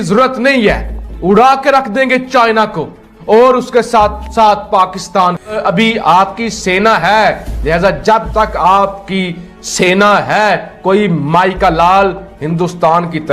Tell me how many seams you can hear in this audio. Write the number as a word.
one